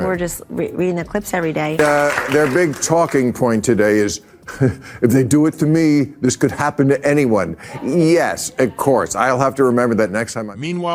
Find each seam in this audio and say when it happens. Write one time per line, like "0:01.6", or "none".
none